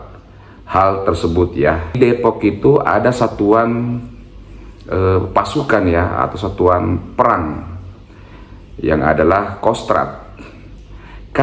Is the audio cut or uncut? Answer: cut